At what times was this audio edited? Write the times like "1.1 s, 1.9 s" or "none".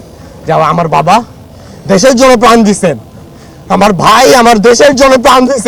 none